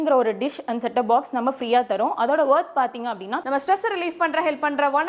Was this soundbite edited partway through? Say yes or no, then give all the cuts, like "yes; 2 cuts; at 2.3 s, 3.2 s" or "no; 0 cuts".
yes; 1 cut; at 3.4 s